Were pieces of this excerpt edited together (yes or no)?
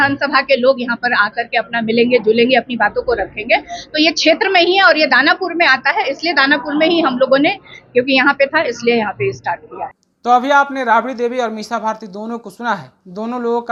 no